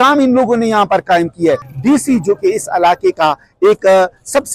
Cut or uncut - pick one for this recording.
cut